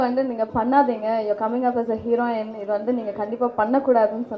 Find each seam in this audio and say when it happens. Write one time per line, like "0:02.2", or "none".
none